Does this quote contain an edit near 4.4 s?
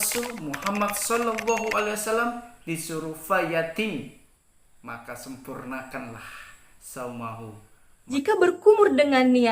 no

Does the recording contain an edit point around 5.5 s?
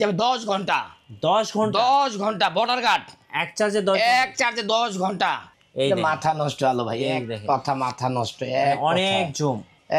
yes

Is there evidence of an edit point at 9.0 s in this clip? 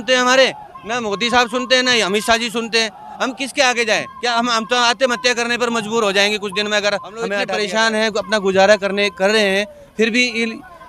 no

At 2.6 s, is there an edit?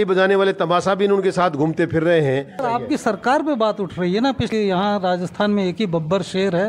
yes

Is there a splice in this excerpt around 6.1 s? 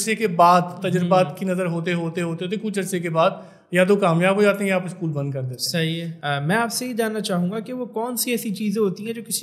yes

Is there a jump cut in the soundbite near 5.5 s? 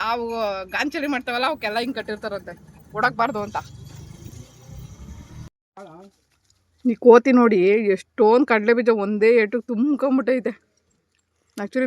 yes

